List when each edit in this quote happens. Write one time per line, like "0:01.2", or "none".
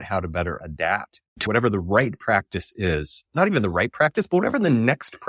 0:01.4
0:03.3